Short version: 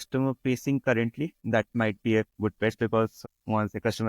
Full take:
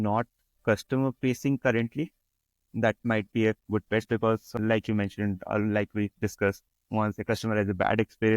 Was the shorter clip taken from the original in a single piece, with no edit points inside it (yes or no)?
no